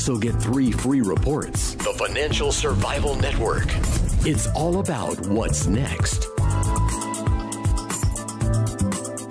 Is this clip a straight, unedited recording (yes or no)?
no